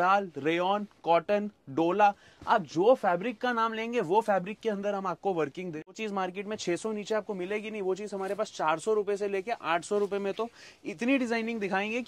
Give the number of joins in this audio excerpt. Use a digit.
1